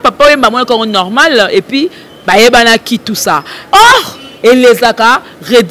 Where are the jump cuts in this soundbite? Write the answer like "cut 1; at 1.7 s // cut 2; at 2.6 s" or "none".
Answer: cut 1; at 3.5 s